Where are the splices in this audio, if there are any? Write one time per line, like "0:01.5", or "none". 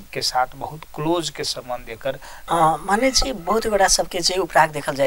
0:02.3